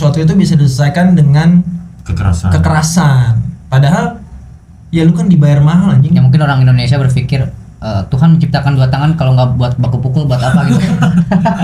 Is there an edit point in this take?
no; 0 cuts

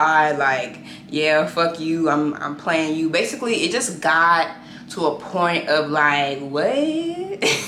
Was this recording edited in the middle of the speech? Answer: no; 0 cuts

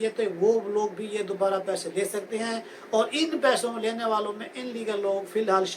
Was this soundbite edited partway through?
no; 0 cuts

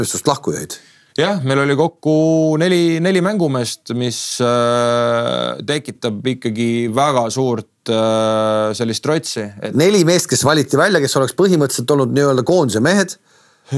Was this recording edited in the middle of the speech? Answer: no; 0 cuts

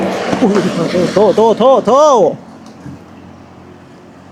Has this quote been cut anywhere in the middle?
no; 0 cuts

